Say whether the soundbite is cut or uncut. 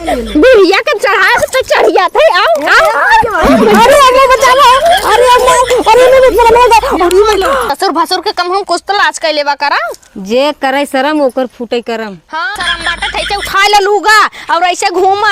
cut